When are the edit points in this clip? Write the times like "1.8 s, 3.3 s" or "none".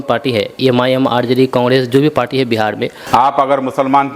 3.0 s